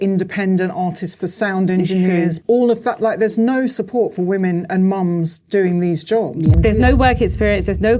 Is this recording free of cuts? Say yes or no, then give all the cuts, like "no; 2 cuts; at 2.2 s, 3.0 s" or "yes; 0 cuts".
no; 2 cuts; at 2.4 s, 6.5 s